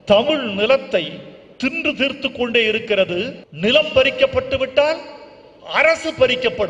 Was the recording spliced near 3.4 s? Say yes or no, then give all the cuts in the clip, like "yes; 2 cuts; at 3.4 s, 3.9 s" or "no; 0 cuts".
yes; 1 cut; at 3.4 s